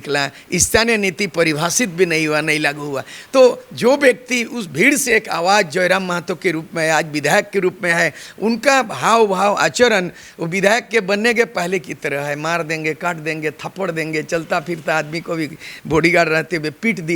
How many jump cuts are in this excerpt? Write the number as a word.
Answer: zero